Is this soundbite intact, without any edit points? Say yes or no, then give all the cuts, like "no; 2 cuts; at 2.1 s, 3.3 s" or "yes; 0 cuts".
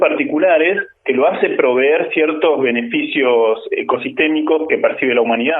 no; 2 cuts; at 0.9 s, 4.7 s